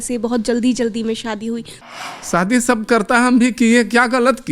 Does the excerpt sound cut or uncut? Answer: cut